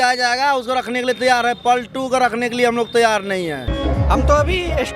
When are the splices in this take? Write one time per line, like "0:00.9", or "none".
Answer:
0:03.7